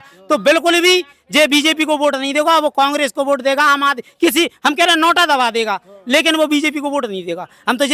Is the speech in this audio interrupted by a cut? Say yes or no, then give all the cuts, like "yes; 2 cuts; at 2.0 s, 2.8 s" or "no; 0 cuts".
no; 0 cuts